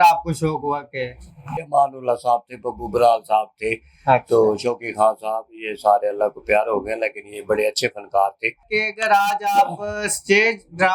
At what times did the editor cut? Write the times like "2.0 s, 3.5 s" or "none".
1.6 s, 8.6 s